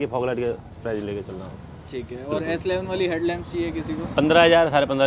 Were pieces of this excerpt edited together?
no; 0 cuts

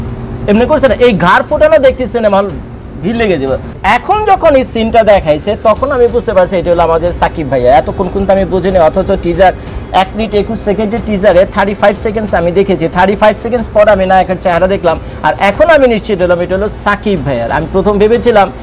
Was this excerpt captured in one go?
no; 1 cut; at 3.7 s

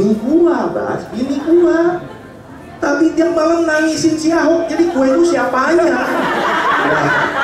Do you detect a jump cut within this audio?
no; 0 cuts

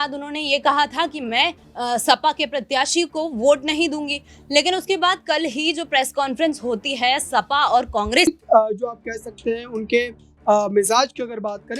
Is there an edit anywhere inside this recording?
yes; 1 cut; at 8.3 s

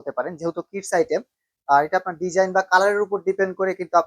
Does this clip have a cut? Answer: no; 0 cuts

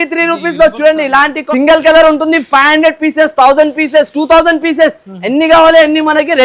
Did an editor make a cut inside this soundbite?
yes; 1 cut; at 1.4 s

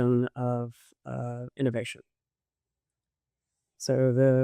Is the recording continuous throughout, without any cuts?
yes; 0 cuts

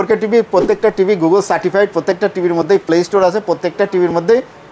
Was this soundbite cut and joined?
no; 0 cuts

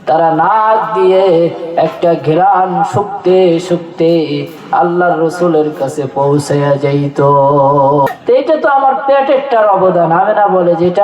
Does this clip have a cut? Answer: yes; 1 cut; at 8.1 s

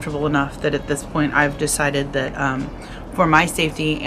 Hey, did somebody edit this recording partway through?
no; 0 cuts

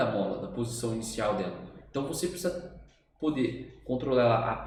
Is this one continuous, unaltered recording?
yes; 0 cuts

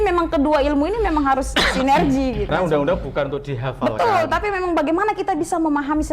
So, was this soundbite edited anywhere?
yes; 1 cut; at 2.5 s

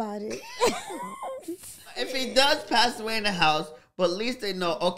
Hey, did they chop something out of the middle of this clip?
no; 0 cuts

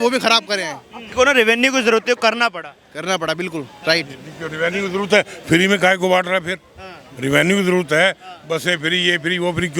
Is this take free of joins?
no; 1 cut; at 1.0 s

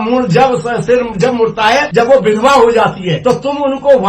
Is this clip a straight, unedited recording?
no; 2 cuts; at 1.9 s, 3.1 s

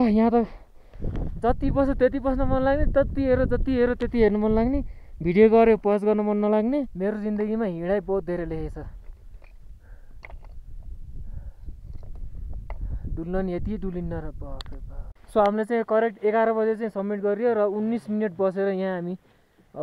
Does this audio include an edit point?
yes; 2 cuts; at 6.9 s, 15.2 s

